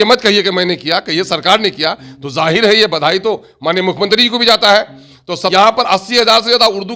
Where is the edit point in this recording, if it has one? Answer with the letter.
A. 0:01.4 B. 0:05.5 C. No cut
B